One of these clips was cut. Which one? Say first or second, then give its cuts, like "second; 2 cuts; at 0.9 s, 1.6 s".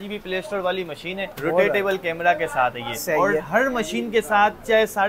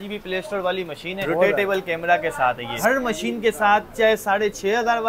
second; 2 cuts; at 1.2 s, 2.8 s